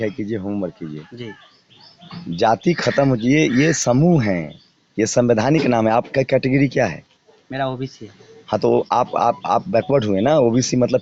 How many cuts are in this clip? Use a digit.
0